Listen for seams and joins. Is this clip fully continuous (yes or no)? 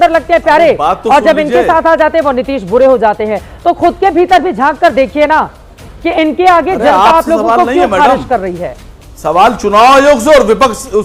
yes